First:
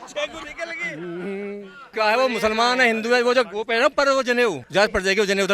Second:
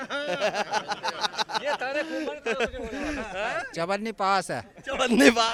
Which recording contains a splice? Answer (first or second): first